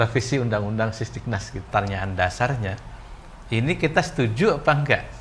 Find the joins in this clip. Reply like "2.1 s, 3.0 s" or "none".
1.7 s